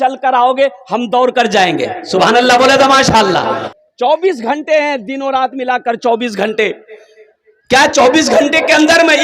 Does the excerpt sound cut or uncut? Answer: cut